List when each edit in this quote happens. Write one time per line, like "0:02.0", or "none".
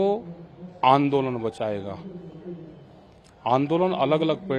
none